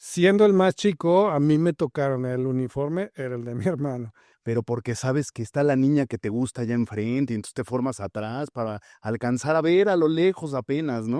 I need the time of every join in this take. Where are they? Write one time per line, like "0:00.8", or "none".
0:04.2